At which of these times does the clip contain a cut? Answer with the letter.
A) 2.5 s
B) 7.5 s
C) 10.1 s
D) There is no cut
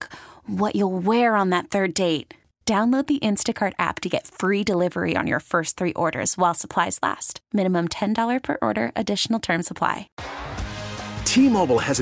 C